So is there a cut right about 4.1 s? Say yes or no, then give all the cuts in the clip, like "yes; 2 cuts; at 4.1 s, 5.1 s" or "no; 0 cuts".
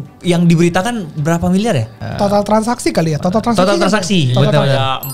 no; 1 cut; at 1.9 s